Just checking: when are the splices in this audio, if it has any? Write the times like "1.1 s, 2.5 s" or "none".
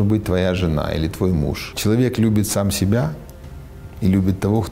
1.7 s